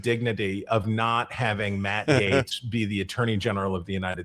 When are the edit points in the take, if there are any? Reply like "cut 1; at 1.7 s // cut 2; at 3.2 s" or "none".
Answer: none

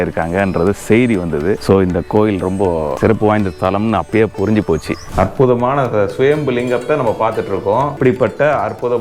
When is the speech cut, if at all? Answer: cut 1; at 1.6 s // cut 2; at 2.9 s // cut 3; at 5.0 s // cut 4; at 8.0 s

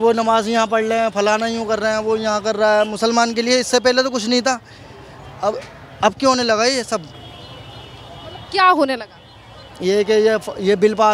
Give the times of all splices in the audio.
none

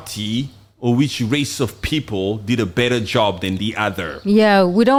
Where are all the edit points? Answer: none

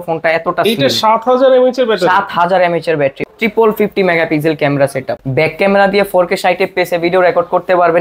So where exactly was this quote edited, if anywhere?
cut 1; at 3.2 s // cut 2; at 5.1 s

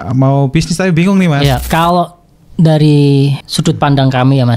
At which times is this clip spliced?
cut 1; at 1.6 s // cut 2; at 3.4 s

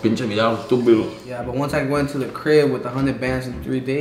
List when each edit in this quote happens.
cut 1; at 1.2 s

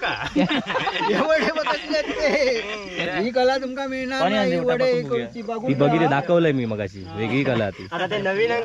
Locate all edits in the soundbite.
cut 1; at 2.9 s

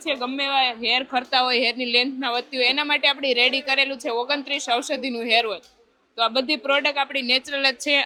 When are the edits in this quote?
none

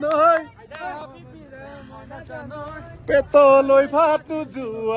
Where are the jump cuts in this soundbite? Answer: none

